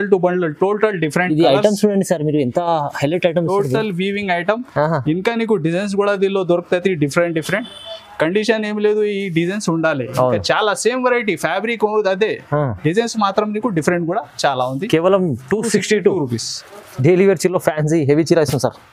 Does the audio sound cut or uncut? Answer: uncut